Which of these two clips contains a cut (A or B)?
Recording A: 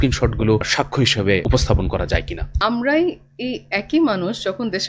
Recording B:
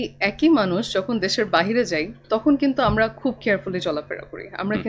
A